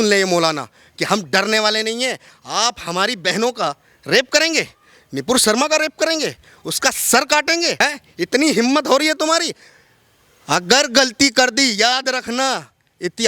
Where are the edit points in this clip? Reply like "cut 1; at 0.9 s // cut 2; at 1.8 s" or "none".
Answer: cut 1; at 7.8 s